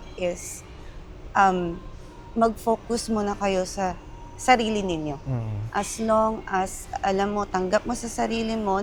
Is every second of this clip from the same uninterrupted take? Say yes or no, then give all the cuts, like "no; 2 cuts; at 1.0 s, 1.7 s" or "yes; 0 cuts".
yes; 0 cuts